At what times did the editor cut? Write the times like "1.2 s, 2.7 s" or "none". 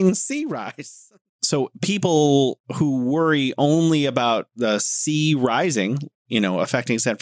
1.3 s